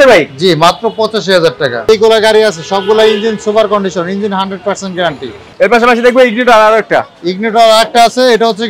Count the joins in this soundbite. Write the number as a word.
two